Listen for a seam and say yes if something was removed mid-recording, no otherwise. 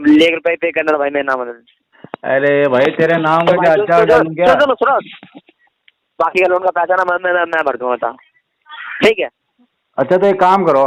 no